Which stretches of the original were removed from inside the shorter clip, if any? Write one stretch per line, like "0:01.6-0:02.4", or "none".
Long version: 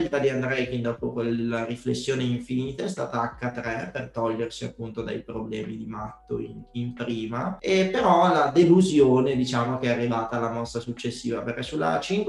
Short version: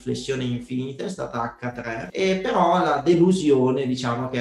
0:03.9-0:07.6